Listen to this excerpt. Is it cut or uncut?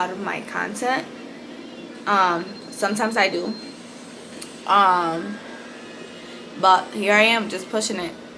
uncut